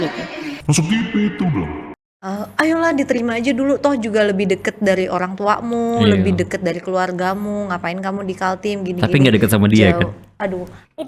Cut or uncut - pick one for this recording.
cut